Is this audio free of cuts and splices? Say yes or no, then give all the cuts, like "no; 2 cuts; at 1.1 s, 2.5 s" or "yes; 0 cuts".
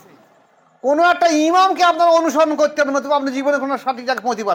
yes; 0 cuts